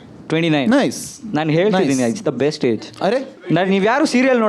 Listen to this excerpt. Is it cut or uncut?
cut